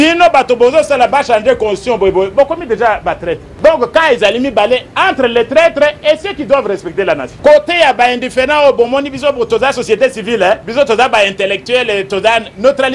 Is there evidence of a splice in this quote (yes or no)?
no